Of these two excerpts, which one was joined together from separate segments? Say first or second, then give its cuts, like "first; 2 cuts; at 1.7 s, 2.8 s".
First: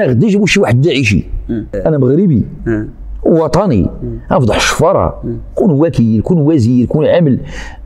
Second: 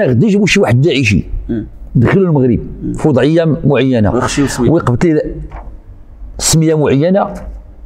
first; 1 cut; at 1.7 s